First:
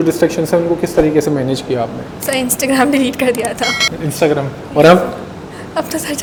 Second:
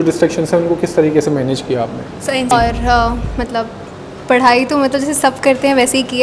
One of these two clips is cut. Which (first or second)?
second